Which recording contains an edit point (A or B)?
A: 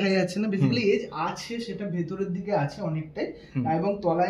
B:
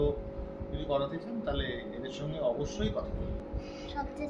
B